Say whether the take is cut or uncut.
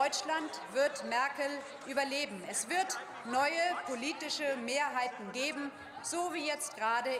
uncut